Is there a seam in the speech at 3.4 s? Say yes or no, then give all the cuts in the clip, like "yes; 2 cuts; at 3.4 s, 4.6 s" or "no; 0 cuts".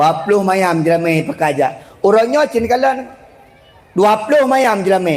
no; 1 cut; at 1.8 s